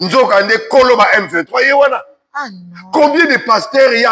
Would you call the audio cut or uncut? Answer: uncut